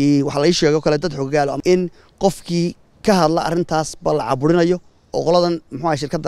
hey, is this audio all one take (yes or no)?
no